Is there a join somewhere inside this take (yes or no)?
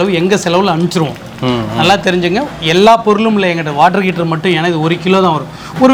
no